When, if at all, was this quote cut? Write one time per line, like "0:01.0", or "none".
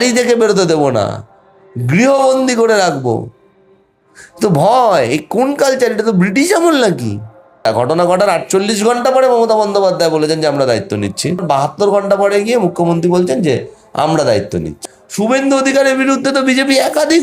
0:07.6
0:11.4
0:14.7